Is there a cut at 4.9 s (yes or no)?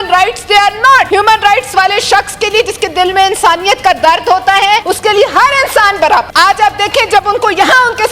yes